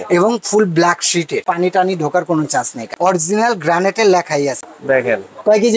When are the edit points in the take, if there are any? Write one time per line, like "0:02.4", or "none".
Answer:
0:01.4
0:02.8
0:04.6